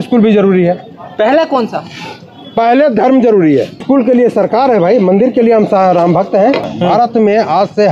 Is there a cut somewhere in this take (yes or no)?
yes